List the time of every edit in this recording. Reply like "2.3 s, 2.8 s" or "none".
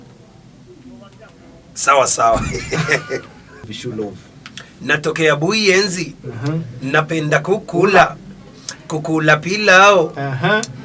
3.7 s